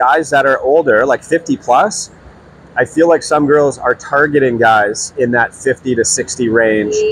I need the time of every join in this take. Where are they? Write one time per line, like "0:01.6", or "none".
none